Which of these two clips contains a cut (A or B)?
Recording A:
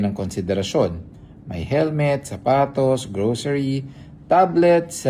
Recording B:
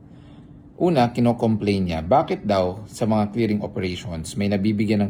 A